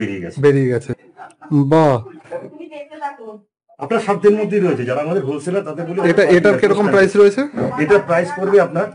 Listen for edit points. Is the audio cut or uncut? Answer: cut